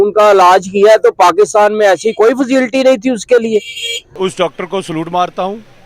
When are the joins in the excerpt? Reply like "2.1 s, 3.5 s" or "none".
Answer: 4.0 s

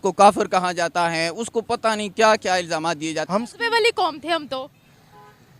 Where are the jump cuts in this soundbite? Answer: 3.3 s

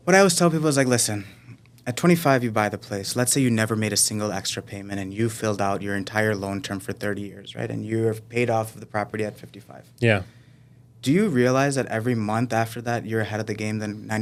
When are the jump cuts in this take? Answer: none

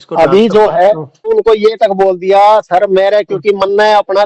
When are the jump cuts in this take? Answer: 1.3 s

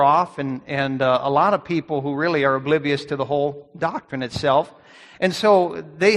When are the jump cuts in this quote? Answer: none

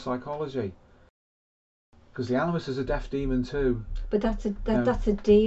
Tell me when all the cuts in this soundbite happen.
1.5 s

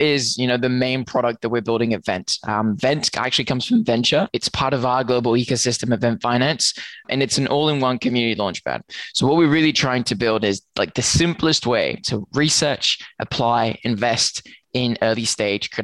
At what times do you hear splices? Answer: 4.3 s, 7.0 s

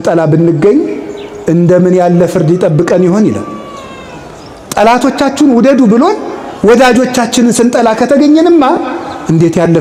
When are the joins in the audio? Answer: none

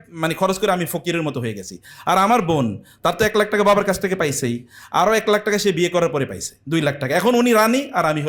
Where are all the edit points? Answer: none

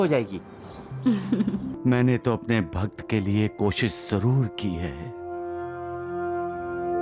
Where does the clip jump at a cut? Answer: 1.7 s

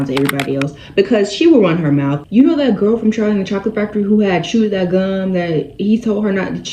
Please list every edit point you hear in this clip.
2.2 s

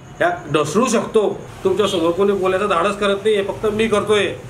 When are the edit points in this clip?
1.5 s

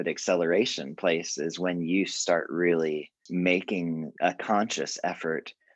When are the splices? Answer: 3.2 s, 4.1 s

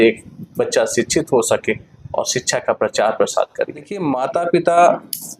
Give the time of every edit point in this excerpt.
4.0 s

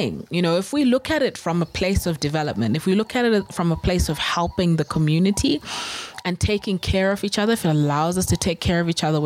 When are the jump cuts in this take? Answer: none

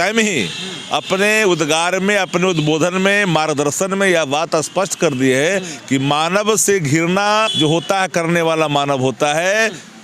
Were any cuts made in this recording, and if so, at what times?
7.5 s

